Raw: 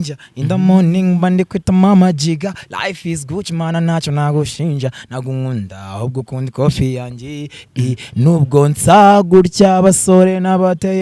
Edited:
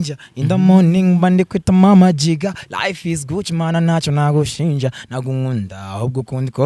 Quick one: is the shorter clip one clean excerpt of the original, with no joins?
yes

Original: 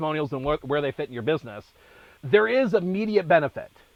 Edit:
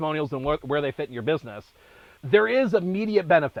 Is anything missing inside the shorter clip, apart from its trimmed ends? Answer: no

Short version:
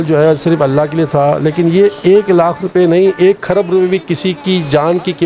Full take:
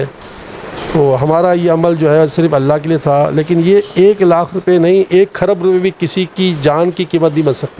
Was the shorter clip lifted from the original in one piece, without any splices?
yes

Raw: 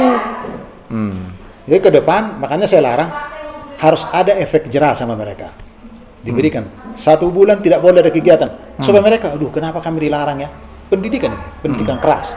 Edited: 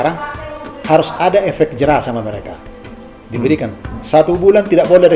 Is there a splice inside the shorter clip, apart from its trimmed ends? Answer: no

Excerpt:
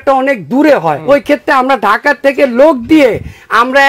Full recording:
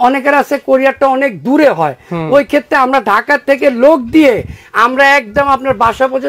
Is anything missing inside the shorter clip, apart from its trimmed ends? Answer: yes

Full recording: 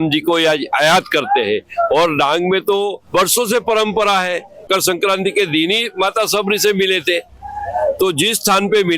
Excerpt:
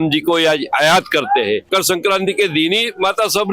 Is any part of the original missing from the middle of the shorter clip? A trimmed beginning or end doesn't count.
yes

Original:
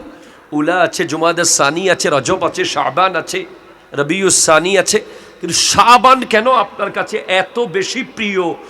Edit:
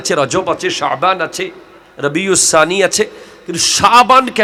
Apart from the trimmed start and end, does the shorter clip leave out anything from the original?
no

